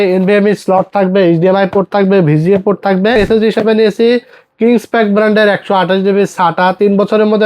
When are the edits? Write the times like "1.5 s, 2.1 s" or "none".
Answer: 3.2 s